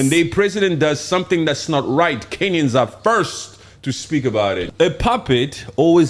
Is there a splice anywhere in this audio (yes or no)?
yes